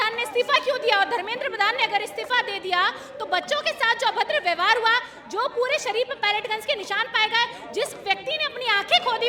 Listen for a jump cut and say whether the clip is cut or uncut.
uncut